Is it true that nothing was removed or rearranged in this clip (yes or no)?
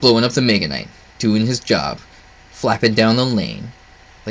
yes